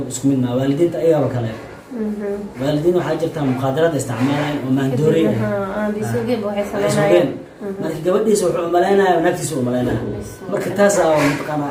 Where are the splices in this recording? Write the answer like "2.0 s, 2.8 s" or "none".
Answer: none